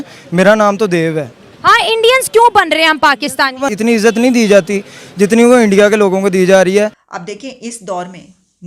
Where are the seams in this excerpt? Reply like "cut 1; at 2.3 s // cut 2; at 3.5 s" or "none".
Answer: cut 1; at 3.7 s // cut 2; at 7.0 s